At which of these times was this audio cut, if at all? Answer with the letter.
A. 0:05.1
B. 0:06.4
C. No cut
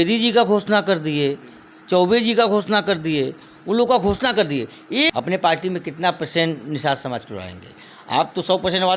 A